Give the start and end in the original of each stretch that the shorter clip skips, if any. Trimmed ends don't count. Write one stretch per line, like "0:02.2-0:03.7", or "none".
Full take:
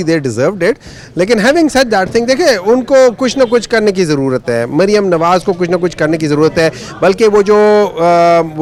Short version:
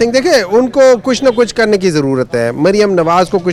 none